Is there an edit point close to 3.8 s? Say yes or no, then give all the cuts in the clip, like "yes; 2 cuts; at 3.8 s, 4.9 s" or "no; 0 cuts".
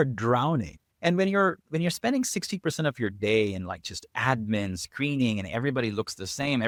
no; 0 cuts